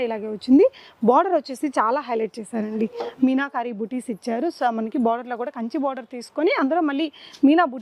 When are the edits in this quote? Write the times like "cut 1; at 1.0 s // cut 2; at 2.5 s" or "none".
none